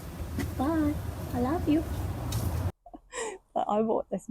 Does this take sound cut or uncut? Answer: cut